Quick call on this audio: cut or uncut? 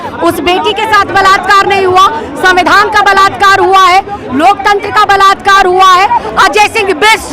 cut